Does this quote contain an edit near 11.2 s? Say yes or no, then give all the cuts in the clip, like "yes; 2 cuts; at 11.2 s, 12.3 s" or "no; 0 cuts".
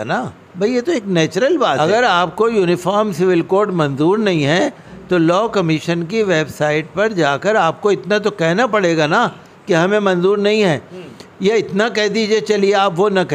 no; 1 cut; at 1.8 s